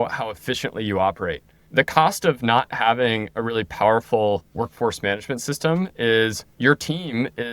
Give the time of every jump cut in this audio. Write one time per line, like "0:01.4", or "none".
0:01.5
0:06.4